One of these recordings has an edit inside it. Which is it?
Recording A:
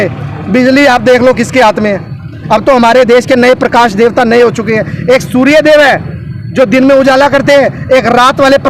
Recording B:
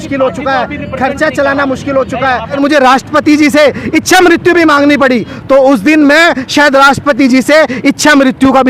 B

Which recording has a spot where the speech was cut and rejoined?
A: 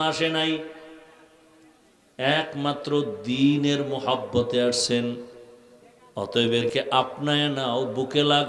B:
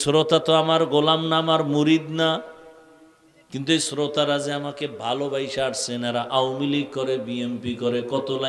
A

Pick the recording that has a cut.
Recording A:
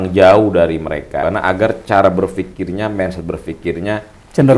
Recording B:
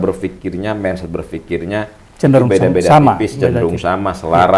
A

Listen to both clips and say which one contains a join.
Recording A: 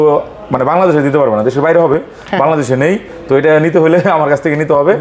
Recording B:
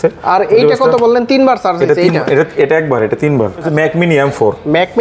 B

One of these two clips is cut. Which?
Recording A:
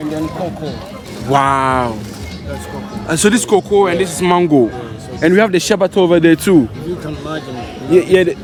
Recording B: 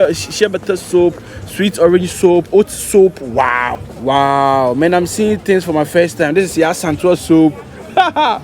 B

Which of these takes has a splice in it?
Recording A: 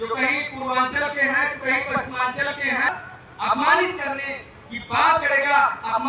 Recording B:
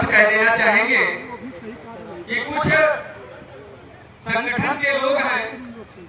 A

